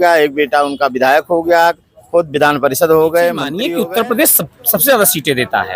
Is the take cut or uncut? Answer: cut